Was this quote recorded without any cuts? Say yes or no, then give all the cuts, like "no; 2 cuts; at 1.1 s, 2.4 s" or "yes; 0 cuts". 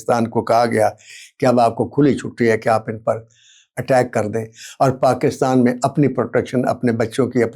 yes; 0 cuts